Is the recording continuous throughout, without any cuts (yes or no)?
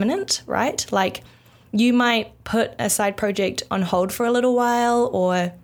yes